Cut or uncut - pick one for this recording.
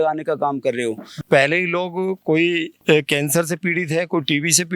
cut